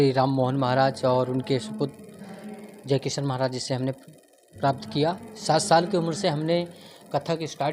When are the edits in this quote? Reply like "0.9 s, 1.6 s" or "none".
5.3 s